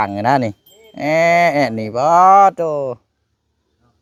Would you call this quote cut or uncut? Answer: uncut